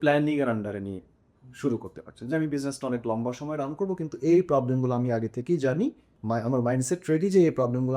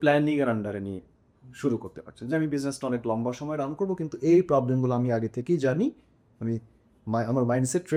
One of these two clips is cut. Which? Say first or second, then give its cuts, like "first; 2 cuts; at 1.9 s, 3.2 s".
first; 1 cut; at 6.1 s